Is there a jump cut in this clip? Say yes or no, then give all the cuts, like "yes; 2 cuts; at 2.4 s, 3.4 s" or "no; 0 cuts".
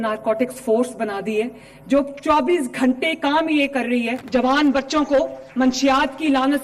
yes; 1 cut; at 4.2 s